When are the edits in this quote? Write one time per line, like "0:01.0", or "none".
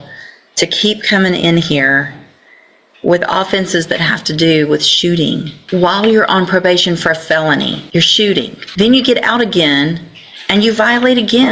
0:05.5
0:07.8
0:08.6